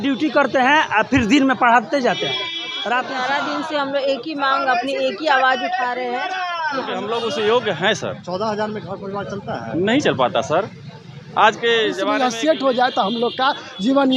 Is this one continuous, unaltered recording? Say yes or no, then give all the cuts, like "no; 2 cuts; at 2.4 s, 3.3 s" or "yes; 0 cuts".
no; 3 cuts; at 3.0 s, 7.0 s, 12.1 s